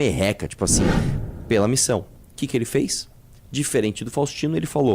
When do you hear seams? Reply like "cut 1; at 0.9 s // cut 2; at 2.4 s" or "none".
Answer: cut 1; at 1.1 s